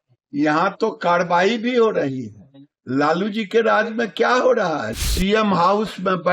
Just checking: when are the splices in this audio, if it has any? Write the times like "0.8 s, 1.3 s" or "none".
4.9 s